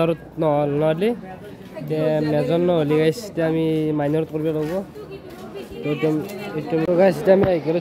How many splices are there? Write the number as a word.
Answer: one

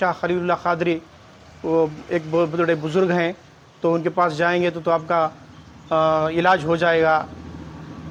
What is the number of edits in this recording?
zero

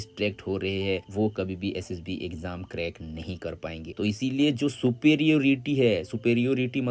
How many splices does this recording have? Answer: one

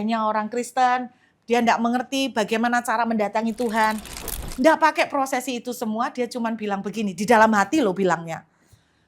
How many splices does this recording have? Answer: one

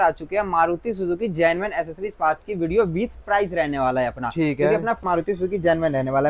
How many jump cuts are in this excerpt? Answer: one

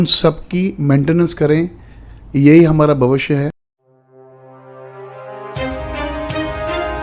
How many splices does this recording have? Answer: one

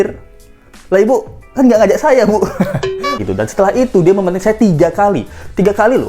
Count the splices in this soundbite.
one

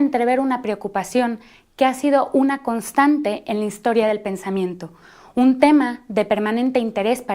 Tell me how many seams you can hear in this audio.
one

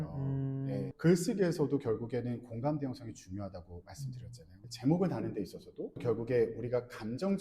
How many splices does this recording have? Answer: one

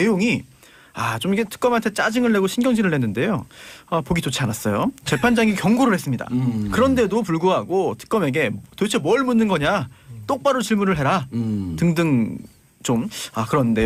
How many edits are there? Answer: zero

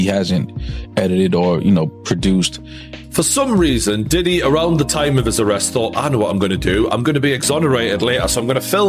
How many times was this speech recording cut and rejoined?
one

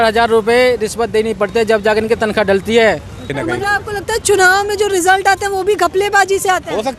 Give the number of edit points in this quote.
one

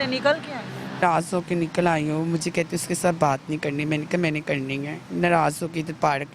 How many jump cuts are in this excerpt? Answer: one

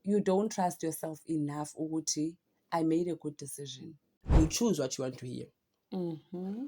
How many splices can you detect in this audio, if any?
one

